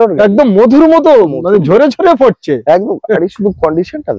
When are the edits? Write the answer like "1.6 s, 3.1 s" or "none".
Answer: none